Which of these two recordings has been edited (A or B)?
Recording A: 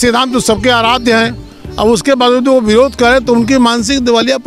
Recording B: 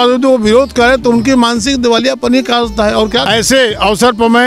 B